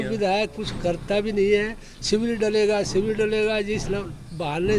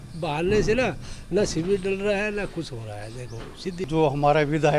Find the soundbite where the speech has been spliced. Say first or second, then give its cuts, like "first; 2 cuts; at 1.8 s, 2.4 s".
second; 1 cut; at 3.6 s